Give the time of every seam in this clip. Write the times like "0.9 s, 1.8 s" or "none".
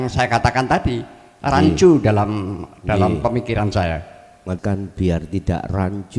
4.6 s

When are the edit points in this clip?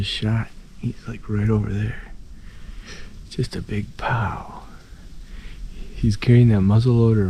none

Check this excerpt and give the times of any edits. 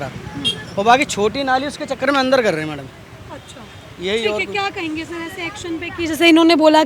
none

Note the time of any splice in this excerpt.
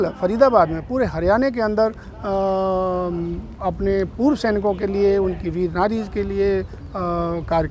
none

